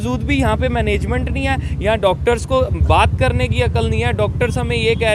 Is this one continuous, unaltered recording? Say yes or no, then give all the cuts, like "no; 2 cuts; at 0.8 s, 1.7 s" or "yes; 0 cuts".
yes; 0 cuts